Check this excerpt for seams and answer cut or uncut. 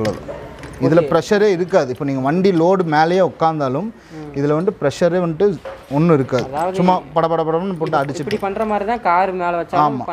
uncut